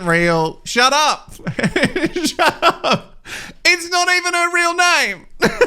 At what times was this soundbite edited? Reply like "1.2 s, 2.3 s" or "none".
none